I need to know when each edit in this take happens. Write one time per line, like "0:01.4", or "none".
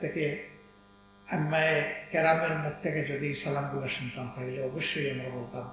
none